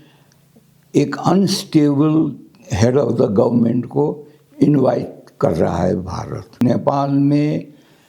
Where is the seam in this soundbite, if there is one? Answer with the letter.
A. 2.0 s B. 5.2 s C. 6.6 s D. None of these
C